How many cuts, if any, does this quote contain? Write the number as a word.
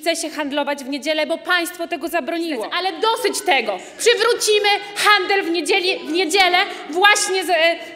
one